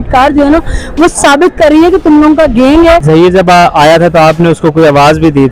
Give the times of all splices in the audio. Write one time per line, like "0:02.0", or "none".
0:03.0